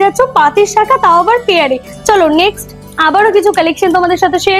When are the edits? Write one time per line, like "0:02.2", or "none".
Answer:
none

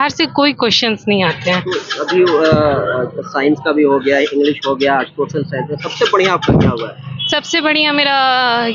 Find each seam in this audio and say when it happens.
none

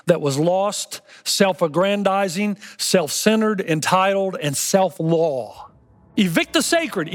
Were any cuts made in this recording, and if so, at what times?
0:06.0

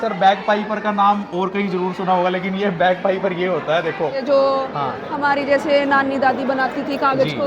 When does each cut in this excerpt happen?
0:04.2

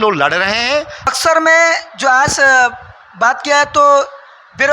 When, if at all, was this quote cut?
0:01.2

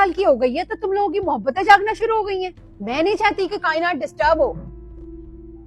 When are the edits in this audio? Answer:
none

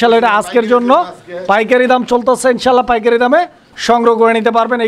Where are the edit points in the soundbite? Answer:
none

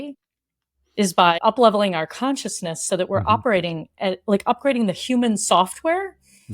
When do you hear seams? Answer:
0:01.4

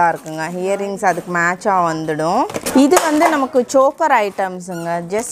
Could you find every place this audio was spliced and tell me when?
0:02.6

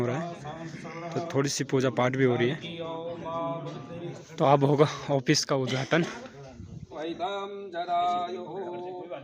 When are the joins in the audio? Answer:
0:04.2
0:07.0

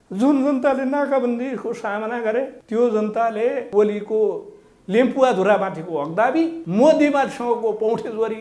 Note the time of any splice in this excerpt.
0:02.6
0:03.6
0:06.6

